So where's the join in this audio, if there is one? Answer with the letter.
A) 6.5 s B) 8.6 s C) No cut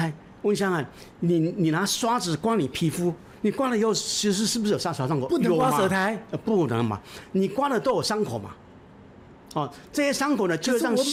C